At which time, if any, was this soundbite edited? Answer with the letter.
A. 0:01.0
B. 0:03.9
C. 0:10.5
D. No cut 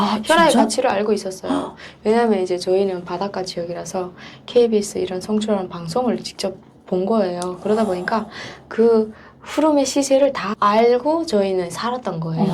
C